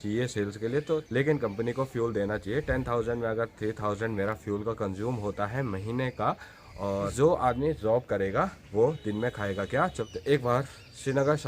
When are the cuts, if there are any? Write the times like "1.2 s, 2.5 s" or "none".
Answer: 1.0 s, 7.1 s, 10.0 s